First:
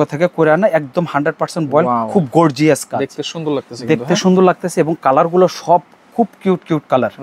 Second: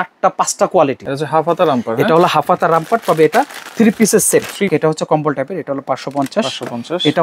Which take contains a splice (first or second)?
second